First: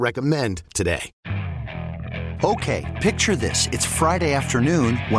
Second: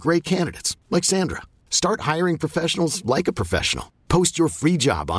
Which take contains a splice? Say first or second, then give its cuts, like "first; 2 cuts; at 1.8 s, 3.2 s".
first; 1 cut; at 1.1 s